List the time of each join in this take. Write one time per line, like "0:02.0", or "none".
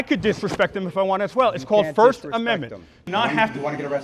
0:03.0